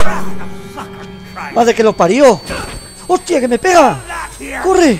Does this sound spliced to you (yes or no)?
no